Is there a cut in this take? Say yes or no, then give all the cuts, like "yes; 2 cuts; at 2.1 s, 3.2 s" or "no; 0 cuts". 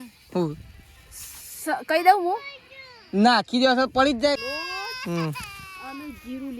yes; 1 cut; at 4.4 s